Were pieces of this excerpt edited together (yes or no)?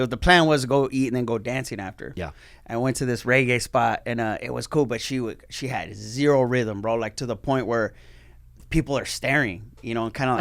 no